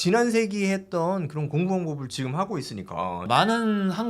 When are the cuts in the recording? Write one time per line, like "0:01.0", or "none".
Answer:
0:03.2

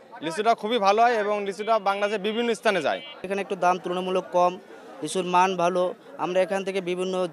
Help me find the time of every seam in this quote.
none

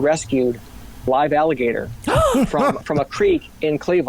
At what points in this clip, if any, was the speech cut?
none

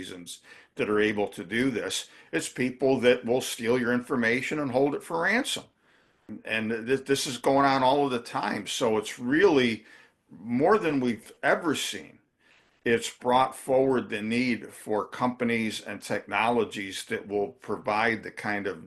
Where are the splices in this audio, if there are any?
0:06.3

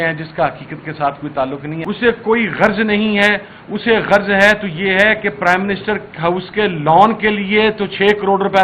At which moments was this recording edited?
0:01.7

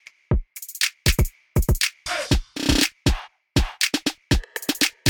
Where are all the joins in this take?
none

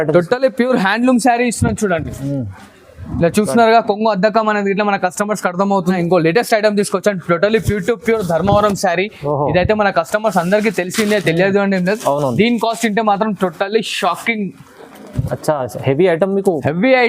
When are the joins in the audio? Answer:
0:06.0

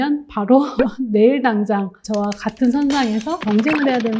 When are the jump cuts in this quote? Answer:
none

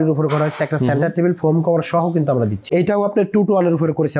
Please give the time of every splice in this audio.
0:02.8

